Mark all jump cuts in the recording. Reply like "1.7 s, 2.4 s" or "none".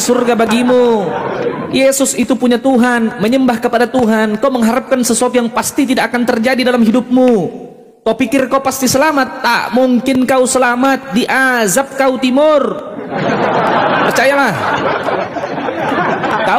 none